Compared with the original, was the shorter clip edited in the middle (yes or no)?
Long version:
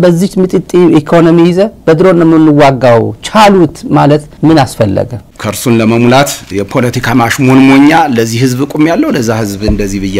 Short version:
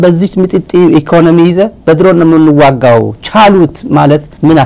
no